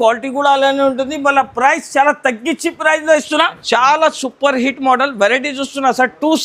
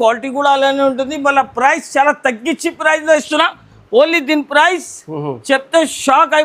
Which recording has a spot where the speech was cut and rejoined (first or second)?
first